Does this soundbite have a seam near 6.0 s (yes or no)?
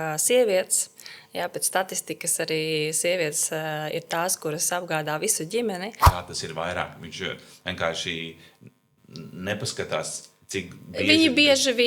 yes